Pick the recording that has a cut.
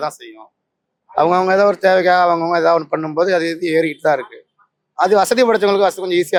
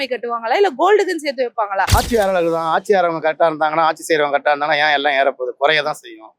second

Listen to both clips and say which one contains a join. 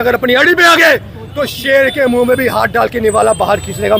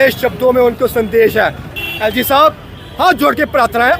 second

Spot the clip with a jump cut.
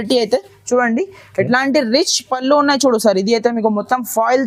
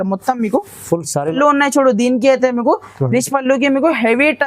second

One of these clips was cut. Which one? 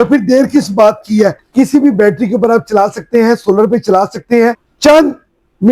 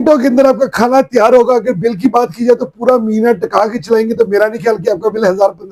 first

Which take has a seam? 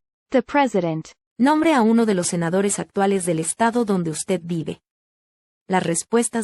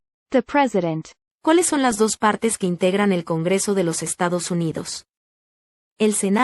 first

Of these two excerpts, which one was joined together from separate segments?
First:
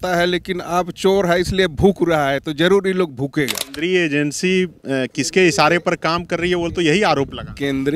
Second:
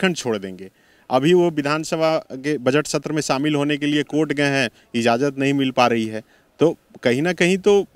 first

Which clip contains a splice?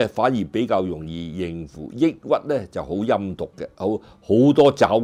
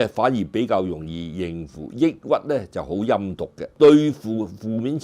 second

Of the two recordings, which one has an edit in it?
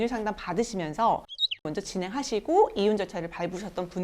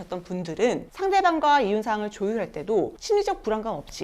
first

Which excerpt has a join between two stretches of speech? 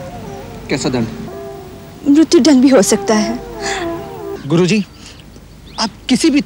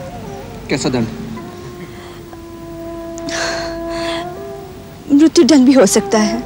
first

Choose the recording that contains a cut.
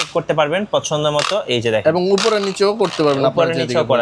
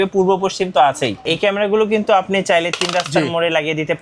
second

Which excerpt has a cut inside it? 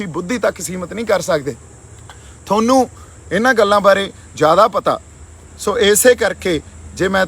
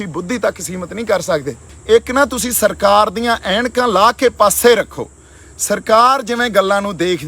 second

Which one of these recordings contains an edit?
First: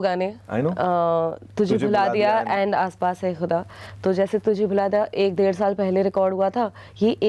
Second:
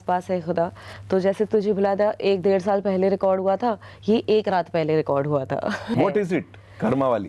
second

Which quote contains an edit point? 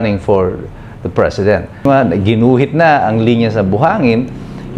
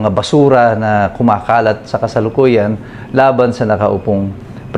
first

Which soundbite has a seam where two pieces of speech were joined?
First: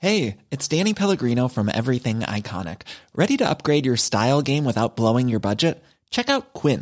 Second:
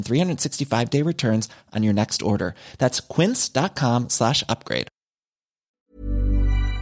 second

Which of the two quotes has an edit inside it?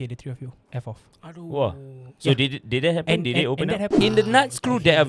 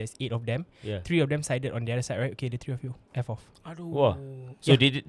first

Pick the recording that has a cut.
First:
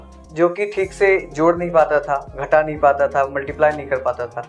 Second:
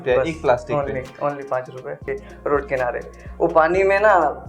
second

